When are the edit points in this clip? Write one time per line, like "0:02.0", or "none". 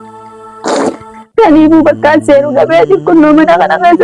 none